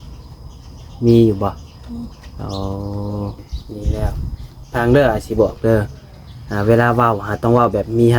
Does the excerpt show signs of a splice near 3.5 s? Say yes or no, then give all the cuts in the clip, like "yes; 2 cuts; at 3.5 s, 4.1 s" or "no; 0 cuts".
yes; 1 cut; at 3.5 s